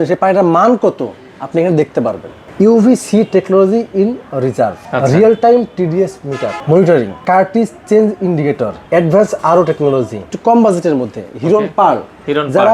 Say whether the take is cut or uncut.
cut